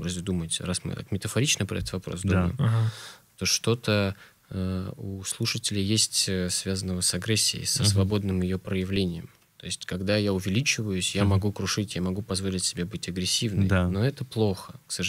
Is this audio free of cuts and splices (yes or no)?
yes